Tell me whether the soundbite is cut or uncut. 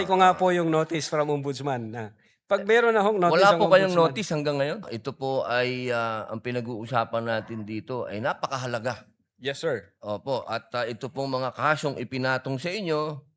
cut